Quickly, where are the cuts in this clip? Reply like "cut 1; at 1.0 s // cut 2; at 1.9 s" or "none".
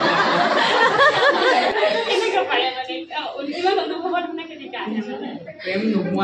cut 1; at 1.7 s